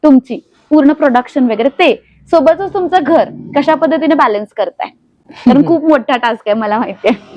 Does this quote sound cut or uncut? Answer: uncut